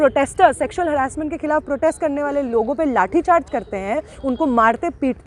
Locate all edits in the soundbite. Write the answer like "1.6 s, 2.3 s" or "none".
none